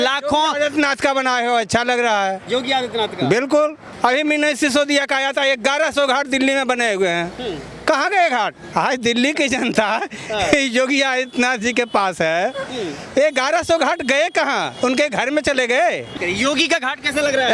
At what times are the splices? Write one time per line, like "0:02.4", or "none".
0:03.8
0:08.6
0:16.2